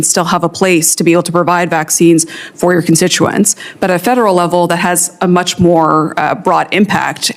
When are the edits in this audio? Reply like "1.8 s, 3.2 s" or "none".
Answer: none